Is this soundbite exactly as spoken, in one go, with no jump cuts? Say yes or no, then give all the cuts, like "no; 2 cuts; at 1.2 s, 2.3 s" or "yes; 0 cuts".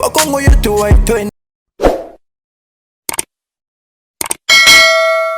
no; 1 cut; at 1.3 s